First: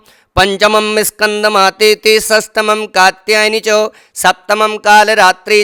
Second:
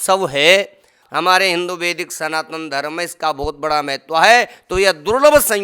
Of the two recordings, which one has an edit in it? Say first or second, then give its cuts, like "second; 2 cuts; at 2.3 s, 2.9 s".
second; 1 cut; at 1.0 s